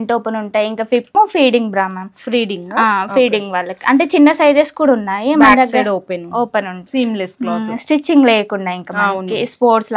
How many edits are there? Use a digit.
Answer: 2